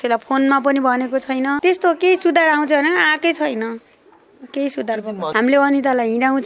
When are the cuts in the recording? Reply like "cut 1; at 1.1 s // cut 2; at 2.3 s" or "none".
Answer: cut 1; at 1.6 s // cut 2; at 5.3 s